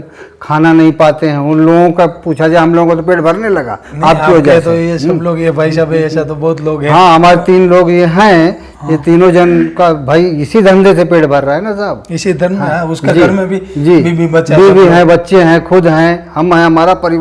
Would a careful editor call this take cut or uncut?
uncut